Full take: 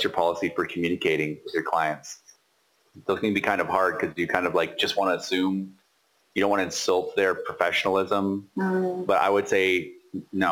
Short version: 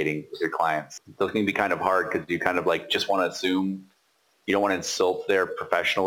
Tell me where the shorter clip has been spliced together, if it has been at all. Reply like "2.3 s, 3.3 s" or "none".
1.0 s